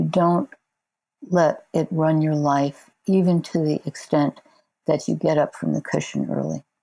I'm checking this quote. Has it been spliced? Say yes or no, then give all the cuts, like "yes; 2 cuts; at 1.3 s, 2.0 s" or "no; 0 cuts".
no; 0 cuts